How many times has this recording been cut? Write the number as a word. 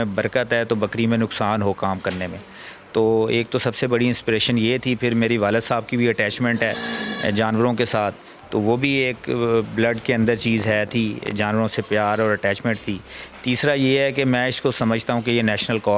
zero